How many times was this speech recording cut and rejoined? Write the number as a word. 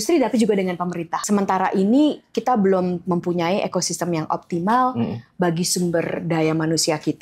one